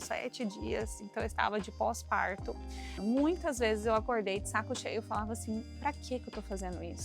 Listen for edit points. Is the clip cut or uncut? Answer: cut